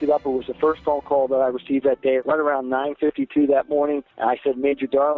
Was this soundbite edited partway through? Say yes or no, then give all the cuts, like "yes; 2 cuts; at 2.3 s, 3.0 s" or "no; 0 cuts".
yes; 2 cuts; at 2.2 s, 4.1 s